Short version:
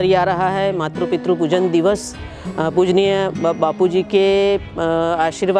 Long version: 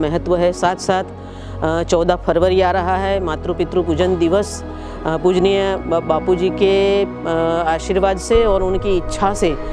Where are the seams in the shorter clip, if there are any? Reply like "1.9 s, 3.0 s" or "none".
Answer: none